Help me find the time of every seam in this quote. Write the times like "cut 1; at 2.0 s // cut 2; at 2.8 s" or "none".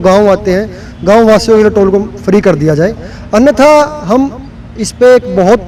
none